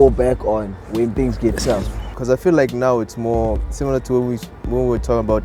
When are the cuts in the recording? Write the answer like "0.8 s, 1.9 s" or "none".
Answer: 2.2 s